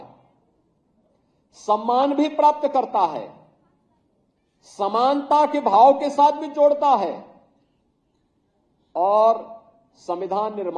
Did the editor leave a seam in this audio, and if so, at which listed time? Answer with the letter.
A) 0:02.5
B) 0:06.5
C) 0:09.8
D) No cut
D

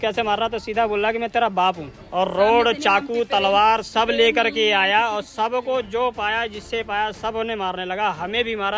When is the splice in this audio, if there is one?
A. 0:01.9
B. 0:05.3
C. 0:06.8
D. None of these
A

